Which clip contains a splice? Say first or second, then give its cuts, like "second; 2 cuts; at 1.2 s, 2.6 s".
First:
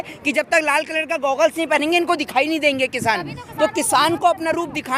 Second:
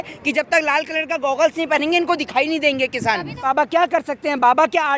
second; 1 cut; at 3.4 s